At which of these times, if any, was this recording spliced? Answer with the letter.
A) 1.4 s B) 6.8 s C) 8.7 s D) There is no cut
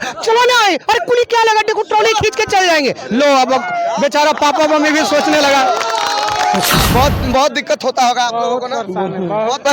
B